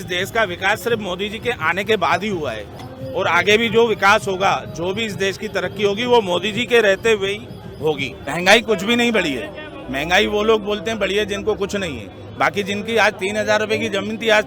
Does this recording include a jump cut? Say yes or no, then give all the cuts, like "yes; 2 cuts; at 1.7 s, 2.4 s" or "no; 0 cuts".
no; 0 cuts